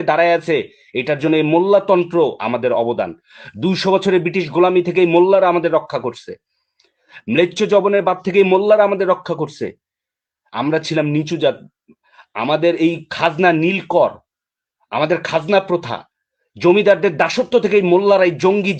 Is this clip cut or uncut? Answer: uncut